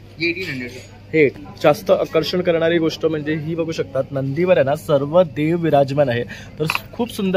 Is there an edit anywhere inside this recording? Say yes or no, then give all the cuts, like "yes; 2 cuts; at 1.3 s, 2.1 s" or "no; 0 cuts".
yes; 1 cut; at 1.3 s